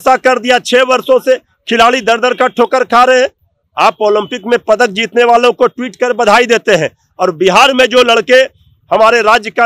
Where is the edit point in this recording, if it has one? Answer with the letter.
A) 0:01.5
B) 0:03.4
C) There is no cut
C